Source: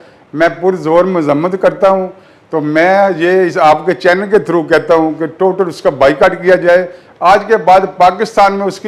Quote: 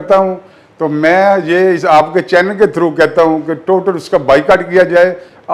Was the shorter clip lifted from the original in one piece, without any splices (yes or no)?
yes